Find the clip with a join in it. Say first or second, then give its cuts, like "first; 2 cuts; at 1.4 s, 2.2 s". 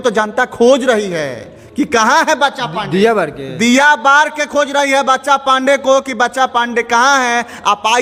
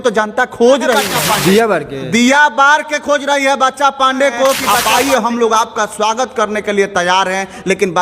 second; 2 cuts; at 1.1 s, 4.7 s